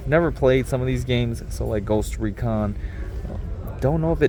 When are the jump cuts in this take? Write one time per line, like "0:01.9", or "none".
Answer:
none